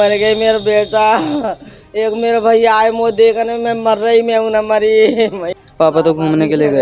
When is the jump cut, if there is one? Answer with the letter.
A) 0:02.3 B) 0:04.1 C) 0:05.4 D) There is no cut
C